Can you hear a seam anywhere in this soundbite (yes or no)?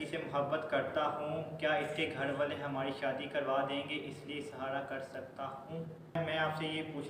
yes